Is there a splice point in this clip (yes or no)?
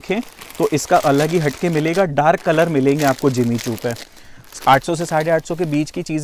no